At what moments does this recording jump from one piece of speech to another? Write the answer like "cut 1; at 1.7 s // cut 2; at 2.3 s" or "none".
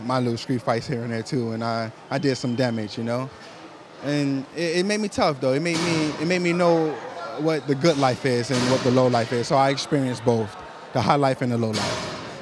cut 1; at 5.1 s